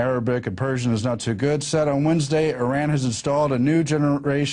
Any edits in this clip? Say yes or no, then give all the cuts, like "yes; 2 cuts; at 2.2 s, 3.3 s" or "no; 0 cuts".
yes; 1 cut; at 2.2 s